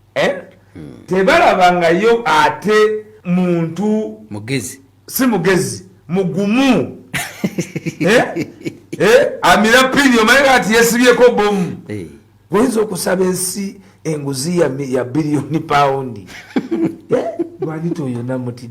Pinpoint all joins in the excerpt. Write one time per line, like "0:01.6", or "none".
0:03.1